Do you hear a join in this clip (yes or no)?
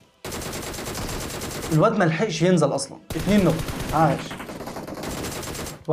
yes